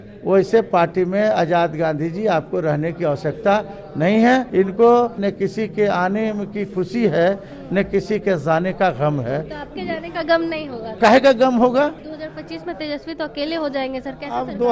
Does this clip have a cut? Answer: yes; 4 cuts; at 4.5 s, 5.2 s, 10.9 s, 12.1 s

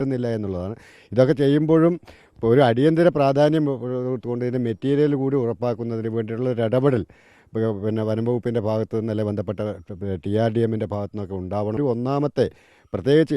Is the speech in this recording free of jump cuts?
no; 1 cut; at 11.8 s

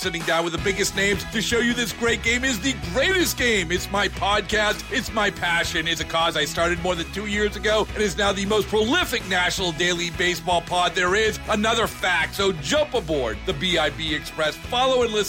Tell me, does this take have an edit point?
no; 0 cuts

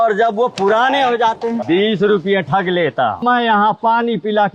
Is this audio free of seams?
no; 2 cuts; at 1.6 s, 3.2 s

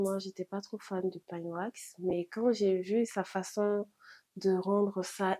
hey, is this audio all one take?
yes; 0 cuts

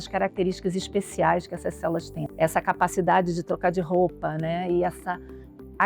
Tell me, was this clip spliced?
yes; 1 cut; at 2.2 s

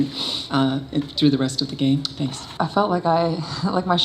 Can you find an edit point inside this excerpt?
yes; 1 cut; at 2.4 s

